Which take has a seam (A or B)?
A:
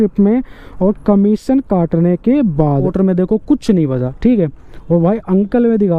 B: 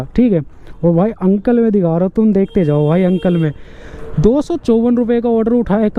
A